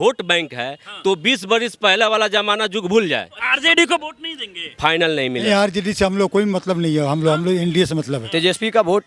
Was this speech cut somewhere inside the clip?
yes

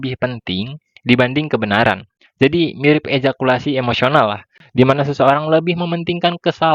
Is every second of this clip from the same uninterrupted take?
yes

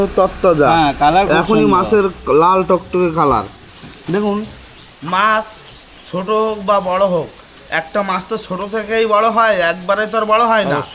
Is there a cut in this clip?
no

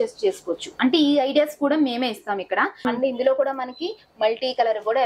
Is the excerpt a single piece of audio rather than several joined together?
no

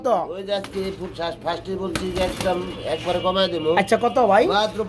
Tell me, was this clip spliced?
no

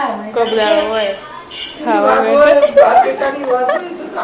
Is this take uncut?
no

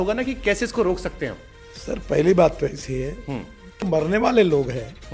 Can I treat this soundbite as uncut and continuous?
no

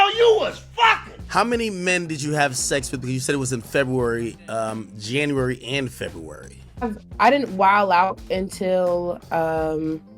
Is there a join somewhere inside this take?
yes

